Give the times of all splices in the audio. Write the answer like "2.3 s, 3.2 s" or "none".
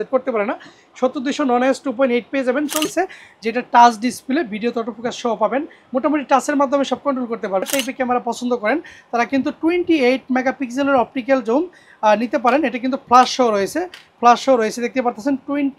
2.8 s, 7.6 s